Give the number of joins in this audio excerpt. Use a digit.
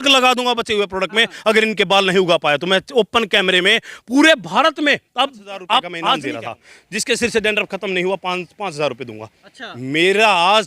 1